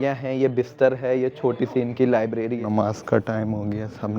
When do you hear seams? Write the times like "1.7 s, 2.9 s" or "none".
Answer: 2.6 s